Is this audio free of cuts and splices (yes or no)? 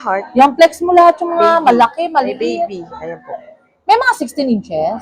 yes